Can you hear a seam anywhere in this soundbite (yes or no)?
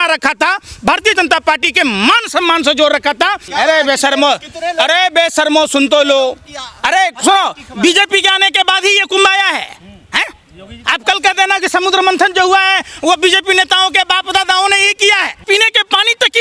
yes